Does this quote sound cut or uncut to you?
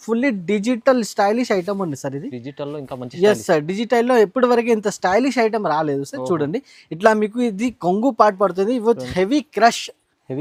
uncut